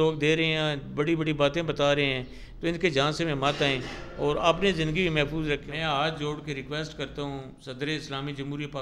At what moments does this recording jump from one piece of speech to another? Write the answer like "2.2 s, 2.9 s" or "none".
5.6 s, 7.6 s